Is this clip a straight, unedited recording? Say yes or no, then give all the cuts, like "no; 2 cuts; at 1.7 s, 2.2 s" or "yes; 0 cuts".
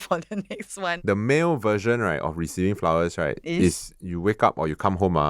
no; 1 cut; at 1.0 s